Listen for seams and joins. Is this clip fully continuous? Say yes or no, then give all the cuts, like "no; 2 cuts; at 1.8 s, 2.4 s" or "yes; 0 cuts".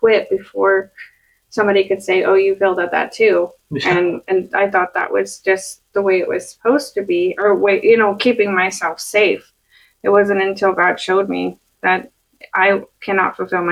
yes; 0 cuts